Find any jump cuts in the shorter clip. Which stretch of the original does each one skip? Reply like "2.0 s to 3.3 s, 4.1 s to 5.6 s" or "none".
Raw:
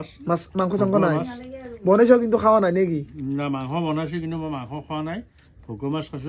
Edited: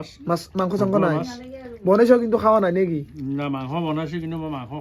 none